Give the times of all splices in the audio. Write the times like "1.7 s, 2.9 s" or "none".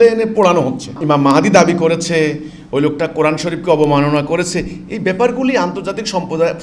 1.0 s